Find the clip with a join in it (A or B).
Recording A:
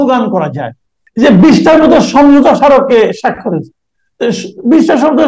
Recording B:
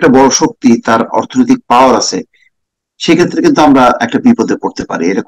A